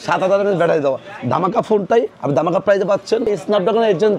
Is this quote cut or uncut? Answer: cut